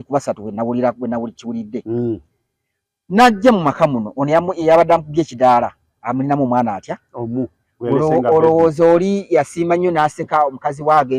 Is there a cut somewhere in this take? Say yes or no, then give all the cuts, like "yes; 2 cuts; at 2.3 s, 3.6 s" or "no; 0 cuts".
no; 0 cuts